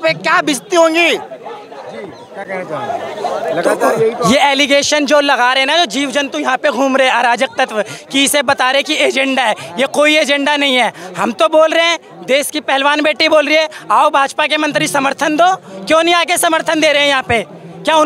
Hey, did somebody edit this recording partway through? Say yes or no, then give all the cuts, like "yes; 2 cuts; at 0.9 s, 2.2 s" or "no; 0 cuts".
no; 0 cuts